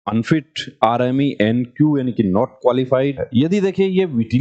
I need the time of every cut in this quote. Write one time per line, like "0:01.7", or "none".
0:03.2